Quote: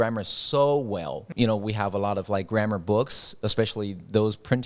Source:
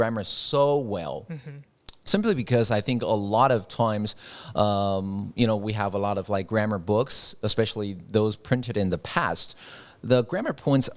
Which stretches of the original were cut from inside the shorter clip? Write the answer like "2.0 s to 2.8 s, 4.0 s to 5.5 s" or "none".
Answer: 1.3 s to 5.3 s